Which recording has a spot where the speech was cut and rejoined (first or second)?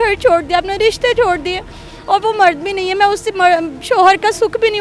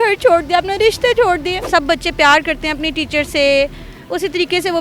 second